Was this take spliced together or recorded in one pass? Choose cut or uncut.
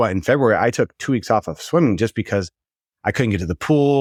uncut